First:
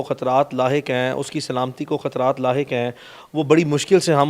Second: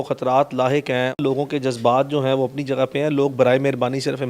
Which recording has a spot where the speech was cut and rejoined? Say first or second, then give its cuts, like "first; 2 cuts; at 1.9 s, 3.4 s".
second; 1 cut; at 1.2 s